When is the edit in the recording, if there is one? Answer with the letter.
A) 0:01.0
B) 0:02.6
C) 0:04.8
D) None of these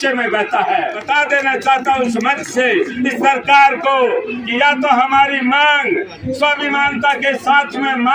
A